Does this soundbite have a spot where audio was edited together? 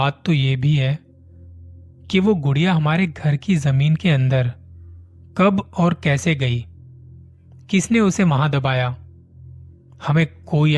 no; 0 cuts

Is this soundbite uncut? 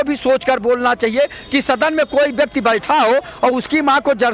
yes; 0 cuts

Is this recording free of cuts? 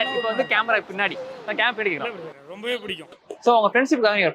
no; 1 cut; at 3.3 s

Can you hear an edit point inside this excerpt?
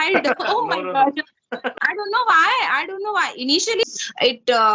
yes; 2 cuts; at 1.7 s, 3.8 s

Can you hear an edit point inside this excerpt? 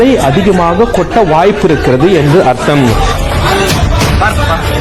no; 0 cuts

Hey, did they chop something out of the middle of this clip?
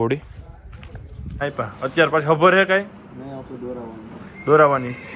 yes; 1 cut; at 1.4 s

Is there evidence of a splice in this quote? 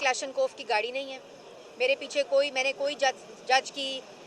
no; 0 cuts

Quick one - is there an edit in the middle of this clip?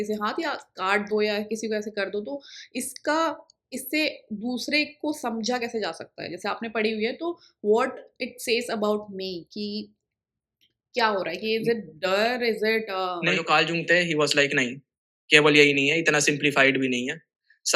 yes; 1 cut; at 13.4 s

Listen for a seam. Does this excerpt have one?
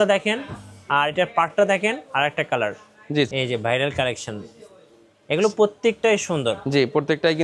yes; 1 cut; at 3.3 s

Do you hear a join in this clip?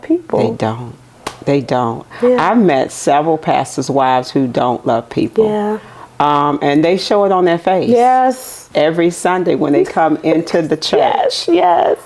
no; 0 cuts

